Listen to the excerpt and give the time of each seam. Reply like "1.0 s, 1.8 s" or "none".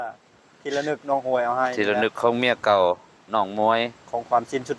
none